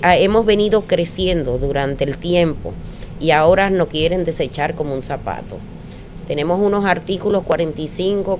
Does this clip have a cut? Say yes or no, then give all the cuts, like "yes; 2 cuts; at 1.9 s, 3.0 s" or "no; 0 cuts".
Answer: no; 0 cuts